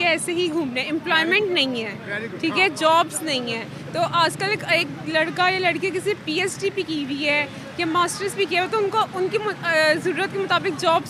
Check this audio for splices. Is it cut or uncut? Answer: uncut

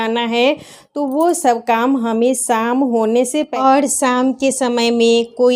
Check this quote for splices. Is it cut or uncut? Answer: cut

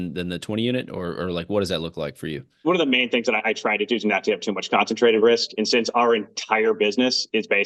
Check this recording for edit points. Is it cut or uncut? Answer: cut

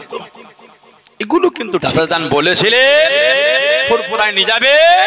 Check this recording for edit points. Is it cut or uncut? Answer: cut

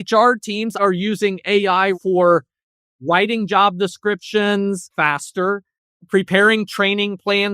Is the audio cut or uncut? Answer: cut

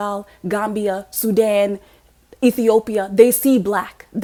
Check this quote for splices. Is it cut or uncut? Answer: uncut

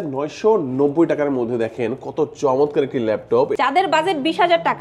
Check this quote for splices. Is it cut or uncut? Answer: cut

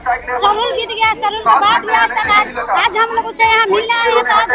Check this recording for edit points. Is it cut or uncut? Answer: uncut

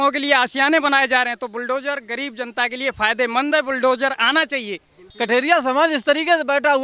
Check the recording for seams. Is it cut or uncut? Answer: cut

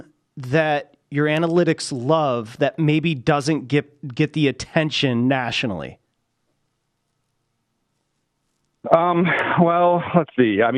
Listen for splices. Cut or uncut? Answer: uncut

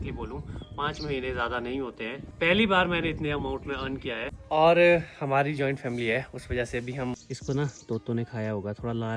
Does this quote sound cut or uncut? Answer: cut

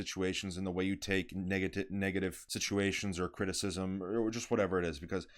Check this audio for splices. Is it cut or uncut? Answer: cut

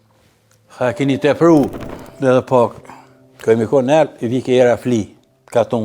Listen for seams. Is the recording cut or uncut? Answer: cut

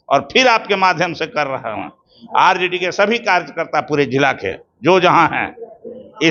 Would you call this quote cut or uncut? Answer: uncut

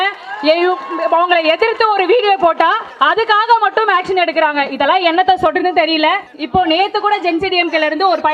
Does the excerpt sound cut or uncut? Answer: cut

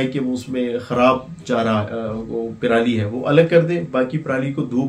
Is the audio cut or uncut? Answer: uncut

